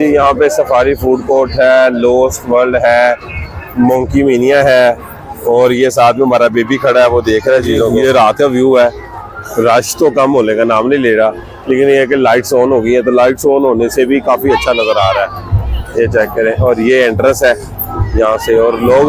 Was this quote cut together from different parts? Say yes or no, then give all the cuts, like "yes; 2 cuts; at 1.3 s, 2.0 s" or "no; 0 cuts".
no; 0 cuts